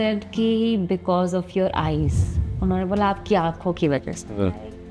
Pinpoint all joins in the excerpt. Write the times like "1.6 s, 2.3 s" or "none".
none

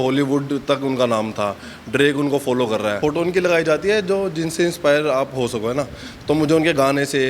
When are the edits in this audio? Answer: 3.0 s

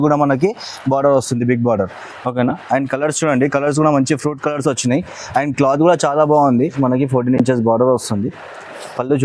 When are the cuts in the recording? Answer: 6.8 s

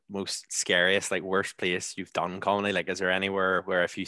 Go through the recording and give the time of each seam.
none

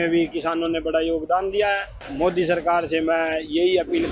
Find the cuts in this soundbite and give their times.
2.0 s

